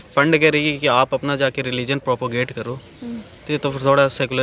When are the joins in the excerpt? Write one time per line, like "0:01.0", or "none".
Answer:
none